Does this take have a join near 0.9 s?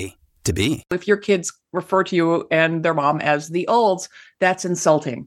yes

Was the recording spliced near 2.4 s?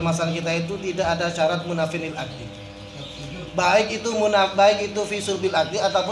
no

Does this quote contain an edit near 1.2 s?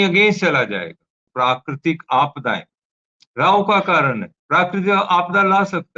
yes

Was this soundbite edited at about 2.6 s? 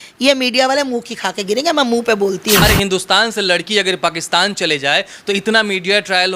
yes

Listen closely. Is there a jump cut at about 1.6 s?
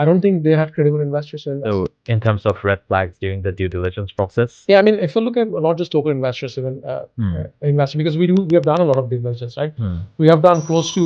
yes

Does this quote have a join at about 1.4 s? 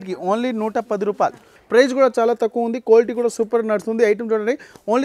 yes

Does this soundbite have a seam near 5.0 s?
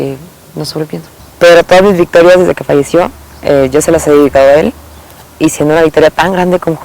no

